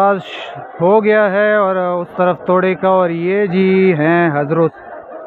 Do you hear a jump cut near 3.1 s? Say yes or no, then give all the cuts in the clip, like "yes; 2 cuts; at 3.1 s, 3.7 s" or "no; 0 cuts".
no; 0 cuts